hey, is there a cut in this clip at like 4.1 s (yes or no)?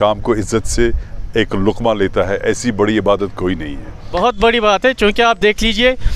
yes